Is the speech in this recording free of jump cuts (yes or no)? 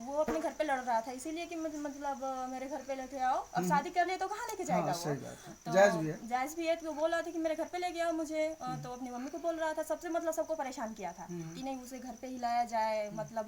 yes